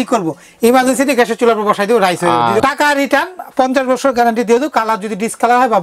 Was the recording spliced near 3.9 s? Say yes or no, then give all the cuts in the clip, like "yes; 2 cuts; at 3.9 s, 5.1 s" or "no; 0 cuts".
no; 1 cut; at 2.6 s